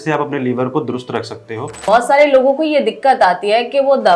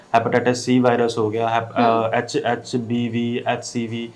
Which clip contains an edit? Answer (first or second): first